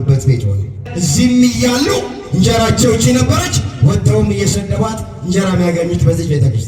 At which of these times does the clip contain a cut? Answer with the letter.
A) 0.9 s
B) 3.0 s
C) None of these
A